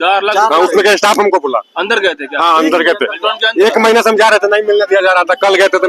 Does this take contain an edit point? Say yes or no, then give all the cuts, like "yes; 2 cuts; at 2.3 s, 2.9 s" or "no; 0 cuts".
no; 0 cuts